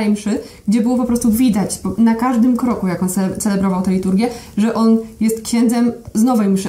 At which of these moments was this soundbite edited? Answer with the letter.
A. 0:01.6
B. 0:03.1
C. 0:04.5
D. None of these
D